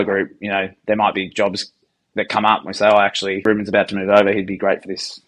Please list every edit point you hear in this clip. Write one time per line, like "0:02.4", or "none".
0:03.4